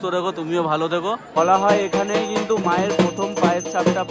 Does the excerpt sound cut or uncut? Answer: cut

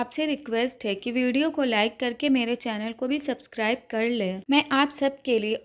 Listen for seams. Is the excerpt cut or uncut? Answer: cut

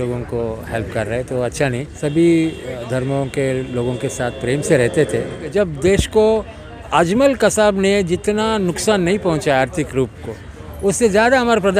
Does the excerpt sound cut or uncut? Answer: cut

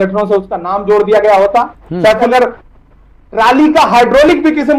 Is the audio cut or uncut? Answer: cut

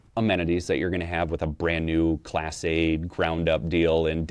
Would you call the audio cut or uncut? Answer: uncut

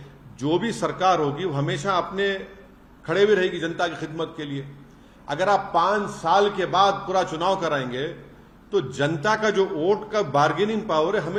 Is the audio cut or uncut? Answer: uncut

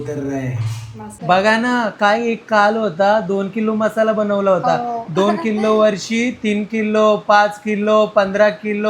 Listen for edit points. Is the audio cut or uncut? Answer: cut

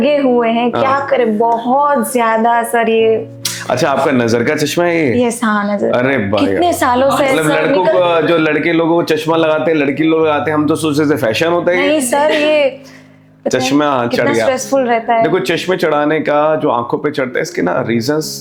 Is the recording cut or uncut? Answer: uncut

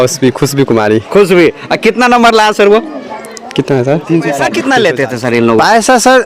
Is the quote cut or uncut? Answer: cut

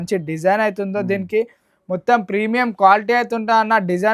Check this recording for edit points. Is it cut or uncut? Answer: uncut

